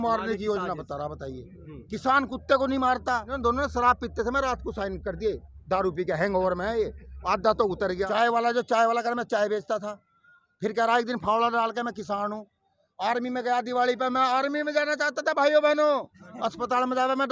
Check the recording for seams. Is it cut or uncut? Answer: cut